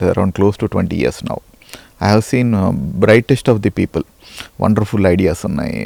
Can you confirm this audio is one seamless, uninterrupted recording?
yes; 0 cuts

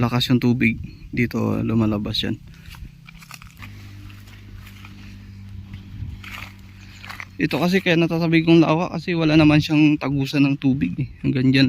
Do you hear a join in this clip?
yes; 1 cut; at 3.6 s

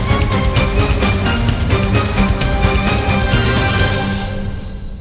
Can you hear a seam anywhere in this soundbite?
no; 0 cuts

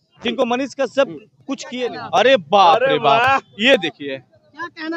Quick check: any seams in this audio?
yes; 1 cut; at 1.7 s

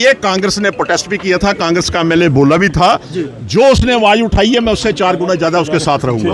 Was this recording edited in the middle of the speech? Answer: no; 0 cuts

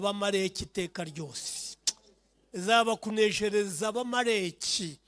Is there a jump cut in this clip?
no; 0 cuts

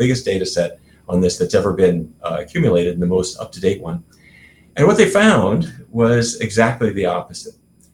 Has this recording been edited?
no; 0 cuts

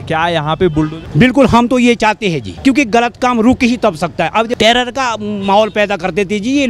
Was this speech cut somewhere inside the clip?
yes; 3 cuts; at 1.0 s, 2.5 s, 4.5 s

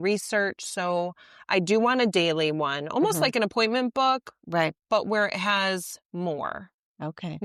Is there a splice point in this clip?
no; 0 cuts

